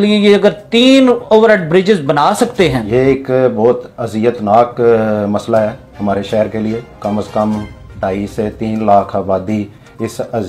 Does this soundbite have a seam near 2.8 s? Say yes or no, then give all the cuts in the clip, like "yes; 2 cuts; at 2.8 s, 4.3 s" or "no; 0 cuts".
yes; 1 cut; at 2.8 s